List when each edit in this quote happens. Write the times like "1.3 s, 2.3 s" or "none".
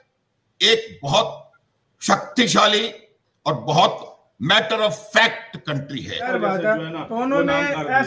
6.3 s